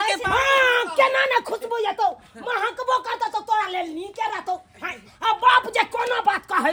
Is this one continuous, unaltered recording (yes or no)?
yes